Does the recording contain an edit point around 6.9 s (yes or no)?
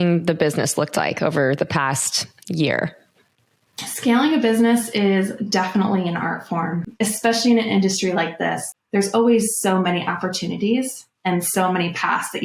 yes